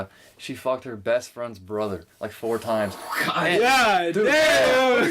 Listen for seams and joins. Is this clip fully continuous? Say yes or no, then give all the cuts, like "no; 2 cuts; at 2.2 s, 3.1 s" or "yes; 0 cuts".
yes; 0 cuts